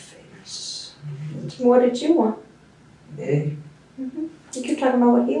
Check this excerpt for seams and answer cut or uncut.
uncut